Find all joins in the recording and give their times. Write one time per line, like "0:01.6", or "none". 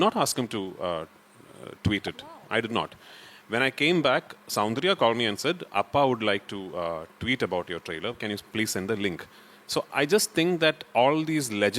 none